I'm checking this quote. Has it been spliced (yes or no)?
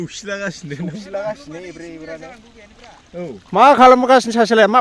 no